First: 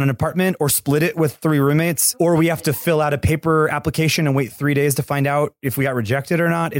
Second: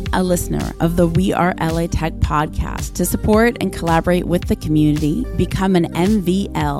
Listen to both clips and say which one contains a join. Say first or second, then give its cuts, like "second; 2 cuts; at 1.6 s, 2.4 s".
first; 1 cut; at 2.1 s